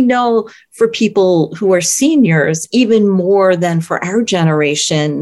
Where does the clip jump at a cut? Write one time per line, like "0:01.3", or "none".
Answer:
none